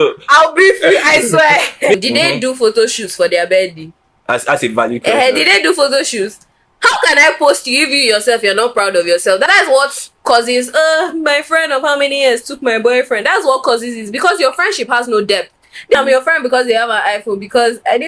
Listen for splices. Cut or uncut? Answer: cut